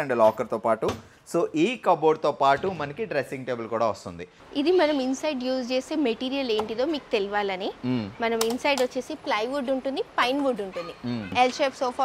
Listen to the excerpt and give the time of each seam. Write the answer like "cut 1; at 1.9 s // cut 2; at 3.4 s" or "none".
cut 1; at 4.4 s // cut 2; at 11.3 s